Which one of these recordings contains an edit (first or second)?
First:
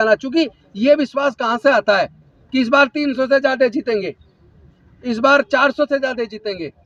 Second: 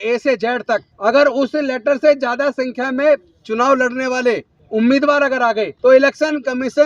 second